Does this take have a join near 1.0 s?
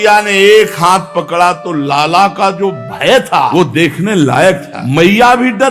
no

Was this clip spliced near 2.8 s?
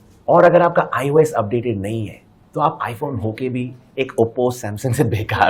no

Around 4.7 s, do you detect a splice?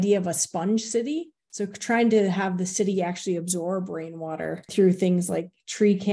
no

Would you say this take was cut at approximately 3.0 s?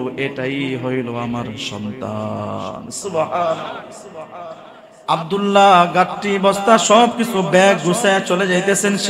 no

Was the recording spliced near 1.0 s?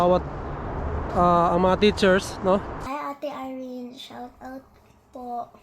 no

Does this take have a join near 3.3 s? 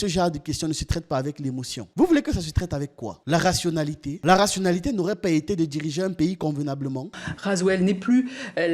no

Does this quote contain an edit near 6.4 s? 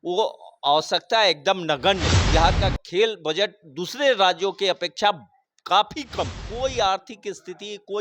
yes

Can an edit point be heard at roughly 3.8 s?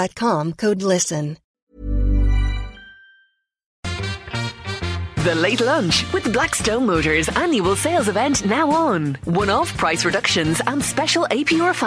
yes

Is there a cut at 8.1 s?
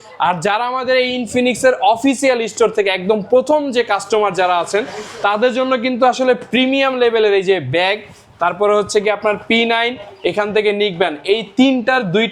no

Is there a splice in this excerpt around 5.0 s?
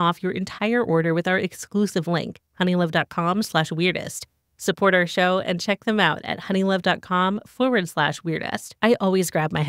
no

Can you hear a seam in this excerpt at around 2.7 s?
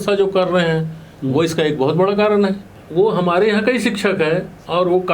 yes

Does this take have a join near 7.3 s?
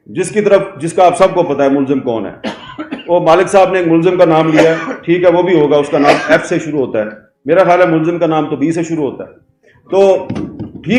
no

